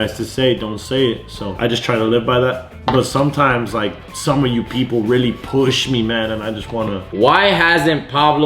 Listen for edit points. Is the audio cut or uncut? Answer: cut